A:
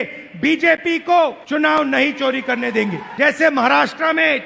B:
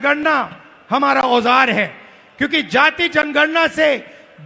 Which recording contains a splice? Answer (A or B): A